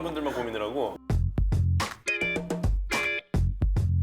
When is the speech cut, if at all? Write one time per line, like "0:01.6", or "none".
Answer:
0:01.0